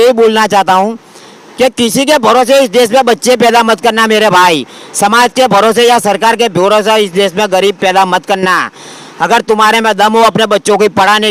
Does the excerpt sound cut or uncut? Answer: uncut